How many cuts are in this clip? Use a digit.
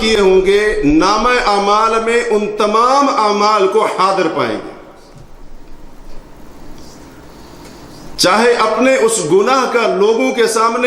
0